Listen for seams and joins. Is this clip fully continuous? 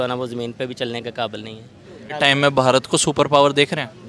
no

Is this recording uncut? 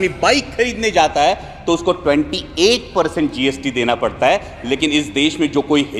yes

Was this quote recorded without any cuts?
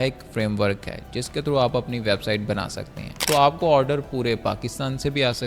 no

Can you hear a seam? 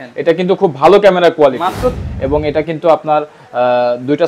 yes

